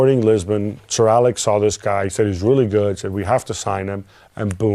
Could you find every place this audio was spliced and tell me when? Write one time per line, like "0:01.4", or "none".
0:02.1